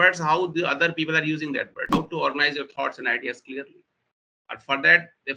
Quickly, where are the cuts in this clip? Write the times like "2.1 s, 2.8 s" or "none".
1.9 s